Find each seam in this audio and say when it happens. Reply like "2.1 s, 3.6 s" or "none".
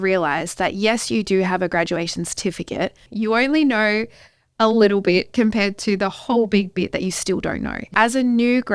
3.1 s, 7.9 s